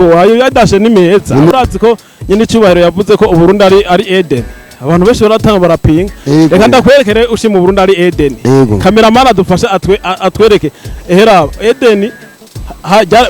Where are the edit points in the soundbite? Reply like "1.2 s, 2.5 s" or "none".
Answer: 1.5 s